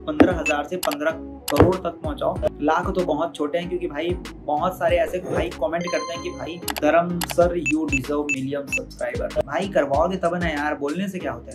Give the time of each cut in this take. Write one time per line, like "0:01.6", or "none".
none